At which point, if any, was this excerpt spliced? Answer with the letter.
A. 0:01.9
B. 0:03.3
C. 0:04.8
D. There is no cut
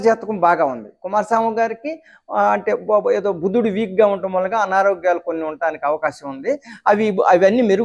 D